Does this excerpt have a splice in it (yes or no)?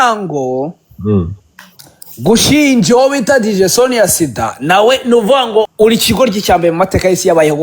yes